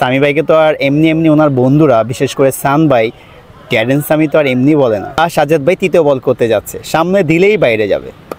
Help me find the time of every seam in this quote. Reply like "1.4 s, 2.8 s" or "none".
5.2 s